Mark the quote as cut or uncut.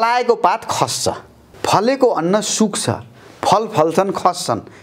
cut